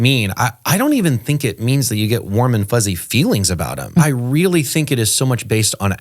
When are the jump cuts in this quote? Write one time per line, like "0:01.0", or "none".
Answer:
0:04.0